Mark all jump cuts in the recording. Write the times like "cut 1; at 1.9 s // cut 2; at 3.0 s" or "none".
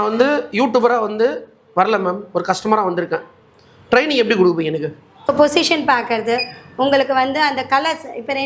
cut 1; at 5.2 s